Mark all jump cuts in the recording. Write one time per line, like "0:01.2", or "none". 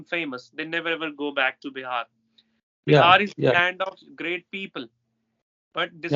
none